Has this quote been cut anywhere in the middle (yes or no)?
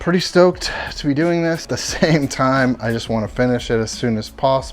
yes